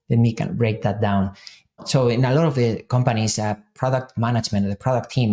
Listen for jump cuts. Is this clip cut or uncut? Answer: cut